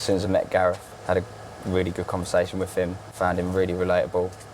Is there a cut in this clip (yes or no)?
yes